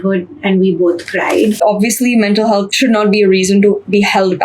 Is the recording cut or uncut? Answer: cut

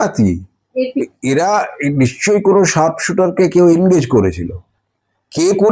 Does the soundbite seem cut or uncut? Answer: uncut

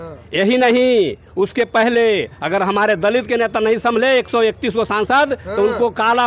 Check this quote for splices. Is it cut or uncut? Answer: uncut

